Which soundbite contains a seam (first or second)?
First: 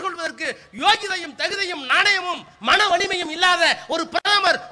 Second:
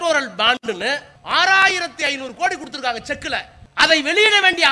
second